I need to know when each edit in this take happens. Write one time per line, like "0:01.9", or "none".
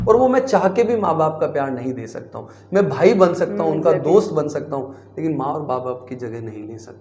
none